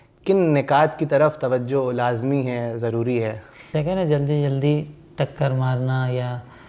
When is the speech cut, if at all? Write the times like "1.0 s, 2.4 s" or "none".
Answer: 3.7 s